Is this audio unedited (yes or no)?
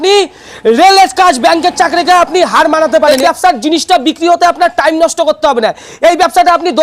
no